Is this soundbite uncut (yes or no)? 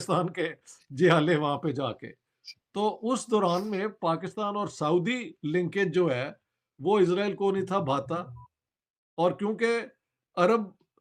yes